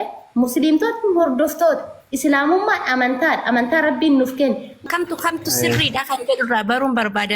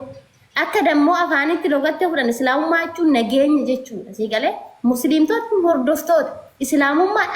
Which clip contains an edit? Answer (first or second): first